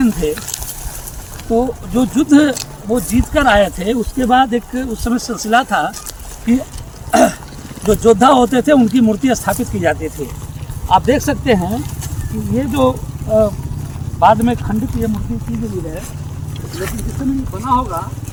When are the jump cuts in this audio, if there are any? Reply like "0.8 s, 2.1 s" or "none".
none